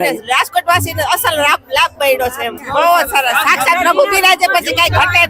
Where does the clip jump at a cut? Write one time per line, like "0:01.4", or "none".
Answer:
0:02.6